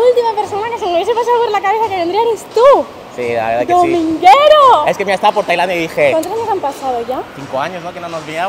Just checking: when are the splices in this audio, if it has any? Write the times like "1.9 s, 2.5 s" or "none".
none